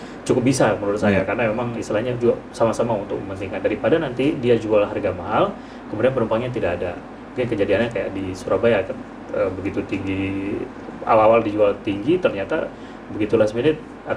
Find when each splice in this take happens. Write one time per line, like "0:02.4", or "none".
none